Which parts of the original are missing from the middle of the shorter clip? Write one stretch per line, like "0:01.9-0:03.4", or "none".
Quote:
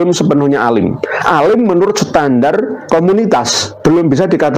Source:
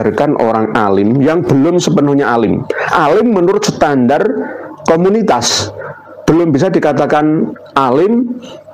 0:04.4-0:04.7
0:05.6-0:06.1